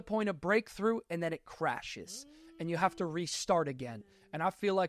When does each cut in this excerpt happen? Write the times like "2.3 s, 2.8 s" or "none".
none